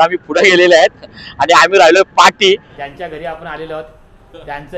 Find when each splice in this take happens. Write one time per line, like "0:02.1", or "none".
0:02.7